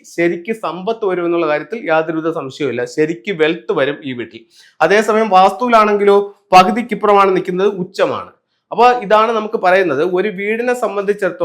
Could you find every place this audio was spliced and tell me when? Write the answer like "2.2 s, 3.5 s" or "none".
none